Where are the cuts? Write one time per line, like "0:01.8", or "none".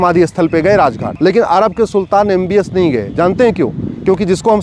0:01.1